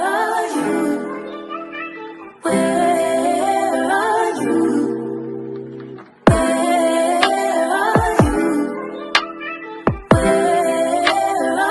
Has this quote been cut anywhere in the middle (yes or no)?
no